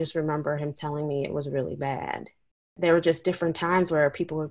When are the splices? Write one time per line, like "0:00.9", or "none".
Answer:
0:02.8